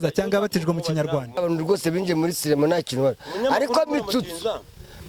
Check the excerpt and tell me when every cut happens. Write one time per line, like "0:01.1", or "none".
0:01.4